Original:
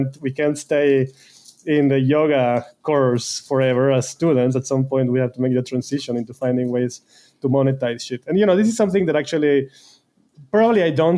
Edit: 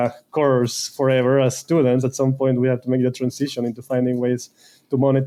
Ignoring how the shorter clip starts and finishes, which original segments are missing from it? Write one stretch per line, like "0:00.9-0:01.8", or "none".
none